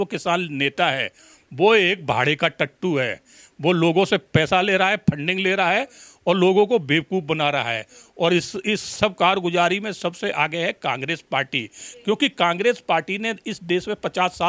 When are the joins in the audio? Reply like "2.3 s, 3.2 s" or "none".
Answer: none